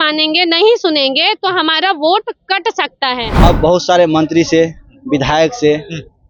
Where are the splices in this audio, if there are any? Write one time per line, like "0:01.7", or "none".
0:03.3